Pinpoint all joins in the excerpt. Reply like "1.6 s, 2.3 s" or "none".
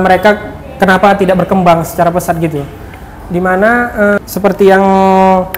4.2 s